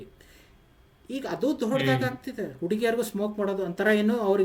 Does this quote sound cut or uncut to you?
uncut